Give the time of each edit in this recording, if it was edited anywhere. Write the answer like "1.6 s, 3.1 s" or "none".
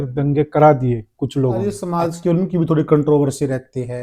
1.6 s